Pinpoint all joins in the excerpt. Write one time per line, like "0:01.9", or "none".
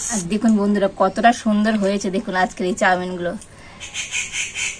none